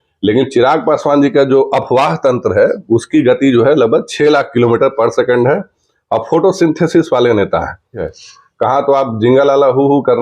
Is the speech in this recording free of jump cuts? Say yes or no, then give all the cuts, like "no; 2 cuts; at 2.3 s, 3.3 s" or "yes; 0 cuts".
no; 1 cut; at 8.1 s